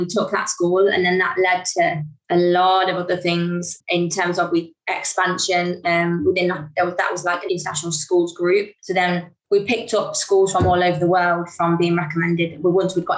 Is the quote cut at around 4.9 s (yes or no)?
no